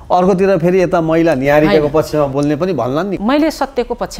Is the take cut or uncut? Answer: cut